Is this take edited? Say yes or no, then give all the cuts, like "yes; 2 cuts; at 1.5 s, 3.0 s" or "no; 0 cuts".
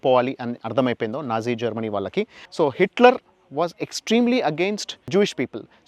yes; 2 cuts; at 2.4 s, 5.1 s